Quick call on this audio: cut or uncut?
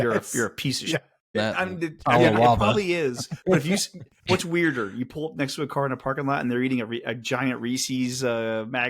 cut